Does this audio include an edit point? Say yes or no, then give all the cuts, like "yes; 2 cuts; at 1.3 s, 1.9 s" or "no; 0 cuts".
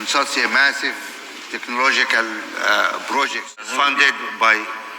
yes; 1 cut; at 3.7 s